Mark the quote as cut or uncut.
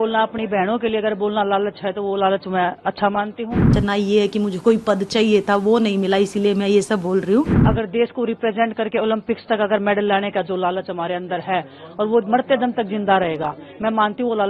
cut